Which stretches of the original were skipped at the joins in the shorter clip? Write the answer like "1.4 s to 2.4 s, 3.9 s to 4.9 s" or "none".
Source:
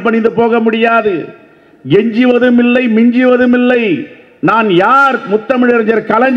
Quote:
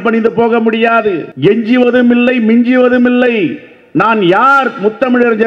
1.3 s to 1.7 s

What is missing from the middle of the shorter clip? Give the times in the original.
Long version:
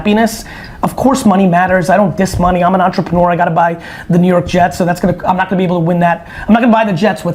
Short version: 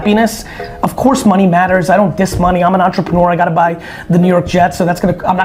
none

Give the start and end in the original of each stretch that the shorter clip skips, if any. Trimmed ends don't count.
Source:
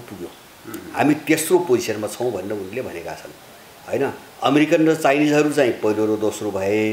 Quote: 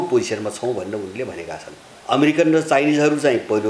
3.5 s to 4.3 s

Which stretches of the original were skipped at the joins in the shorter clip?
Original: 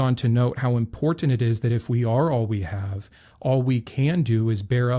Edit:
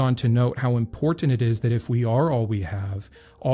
none

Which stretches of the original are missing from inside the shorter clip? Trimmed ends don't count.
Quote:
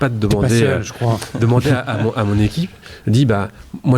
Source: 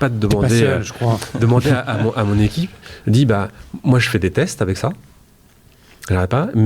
none

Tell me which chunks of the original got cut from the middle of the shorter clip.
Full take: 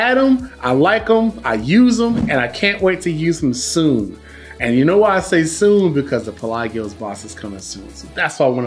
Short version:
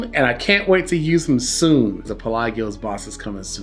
4.3 s to 6.4 s

